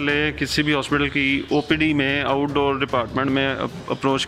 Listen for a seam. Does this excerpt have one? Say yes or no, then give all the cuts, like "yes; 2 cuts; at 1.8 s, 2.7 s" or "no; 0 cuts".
no; 0 cuts